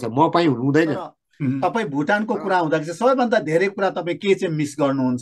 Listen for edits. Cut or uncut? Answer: cut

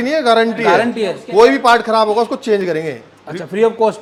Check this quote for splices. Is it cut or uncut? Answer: uncut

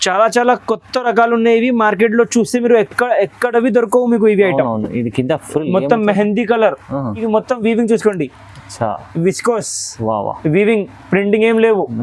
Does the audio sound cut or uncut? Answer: cut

